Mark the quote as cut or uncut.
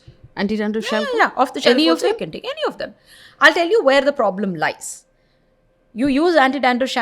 uncut